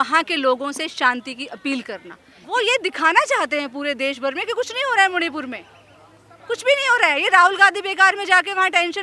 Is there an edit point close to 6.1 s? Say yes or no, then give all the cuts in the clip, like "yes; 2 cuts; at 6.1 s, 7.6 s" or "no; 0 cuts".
no; 1 cut; at 2.3 s